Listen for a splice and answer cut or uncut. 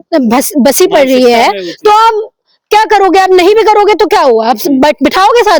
uncut